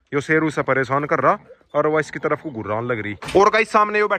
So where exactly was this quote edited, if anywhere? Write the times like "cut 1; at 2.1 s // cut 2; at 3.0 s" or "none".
cut 1; at 3.2 s